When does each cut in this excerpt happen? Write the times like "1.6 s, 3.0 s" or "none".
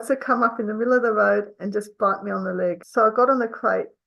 2.8 s